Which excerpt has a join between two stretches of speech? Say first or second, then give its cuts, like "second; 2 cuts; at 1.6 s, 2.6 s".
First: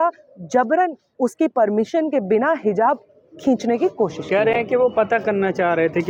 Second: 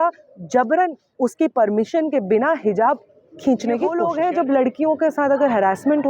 second; 1 cut; at 4.0 s